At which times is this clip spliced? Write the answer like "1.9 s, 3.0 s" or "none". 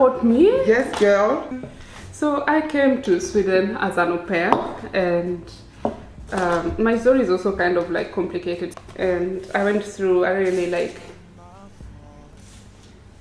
1.5 s, 8.7 s